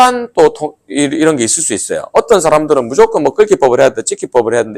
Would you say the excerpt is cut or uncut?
uncut